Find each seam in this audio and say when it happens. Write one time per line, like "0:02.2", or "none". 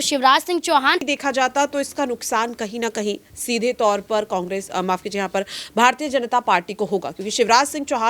0:01.1